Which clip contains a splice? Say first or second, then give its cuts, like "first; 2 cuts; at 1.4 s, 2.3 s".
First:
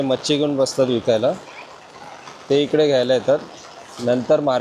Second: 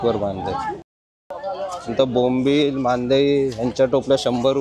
second; 1 cut; at 1.2 s